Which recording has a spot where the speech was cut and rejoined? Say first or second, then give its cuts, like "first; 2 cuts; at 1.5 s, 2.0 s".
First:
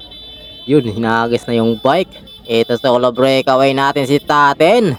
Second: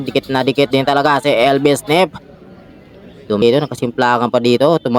second; 1 cut; at 3.4 s